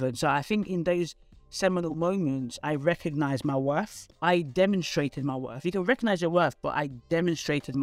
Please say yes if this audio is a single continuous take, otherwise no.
no